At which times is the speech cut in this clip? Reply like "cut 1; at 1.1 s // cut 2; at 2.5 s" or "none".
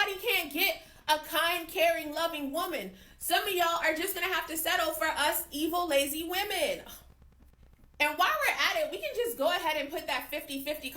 cut 1; at 1.6 s // cut 2; at 9.7 s